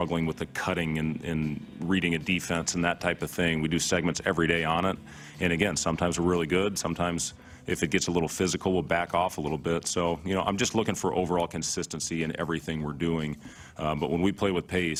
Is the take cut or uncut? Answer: uncut